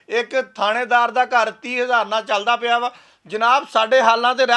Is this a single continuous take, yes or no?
yes